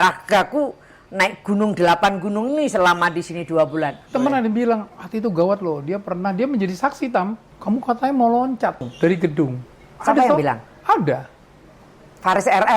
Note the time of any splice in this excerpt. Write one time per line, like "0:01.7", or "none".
0:04.1
0:07.5
0:08.9